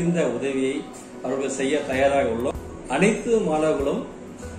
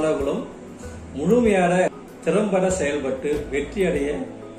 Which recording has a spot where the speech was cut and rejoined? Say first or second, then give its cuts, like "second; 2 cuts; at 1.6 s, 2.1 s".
first; 1 cut; at 2.6 s